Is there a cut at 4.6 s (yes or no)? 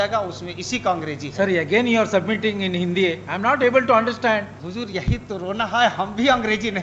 yes